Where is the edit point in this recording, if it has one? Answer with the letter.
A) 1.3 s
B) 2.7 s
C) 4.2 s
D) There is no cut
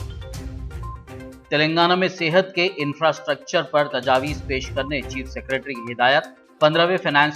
A